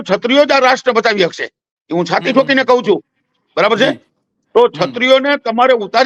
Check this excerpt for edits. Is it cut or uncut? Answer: uncut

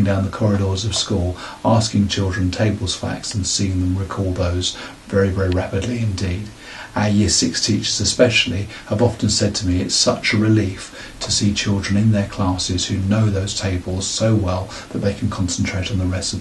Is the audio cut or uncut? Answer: uncut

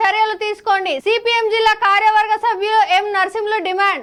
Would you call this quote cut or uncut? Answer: uncut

